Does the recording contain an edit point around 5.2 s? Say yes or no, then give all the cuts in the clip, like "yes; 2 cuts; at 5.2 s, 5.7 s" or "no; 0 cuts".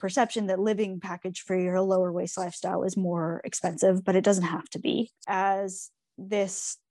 yes; 1 cut; at 5.2 s